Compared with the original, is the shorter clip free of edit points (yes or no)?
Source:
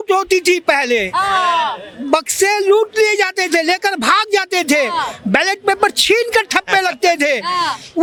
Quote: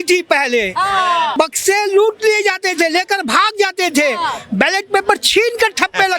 no